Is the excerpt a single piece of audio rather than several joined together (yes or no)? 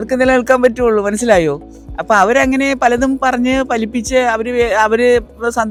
yes